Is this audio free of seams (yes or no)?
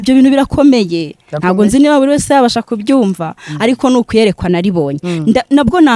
yes